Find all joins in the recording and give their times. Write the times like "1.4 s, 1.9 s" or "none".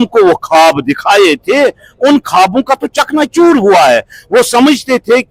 none